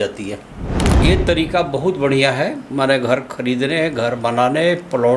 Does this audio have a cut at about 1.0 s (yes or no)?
yes